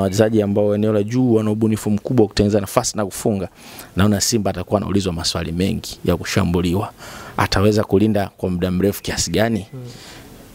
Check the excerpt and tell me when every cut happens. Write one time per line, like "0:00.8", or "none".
none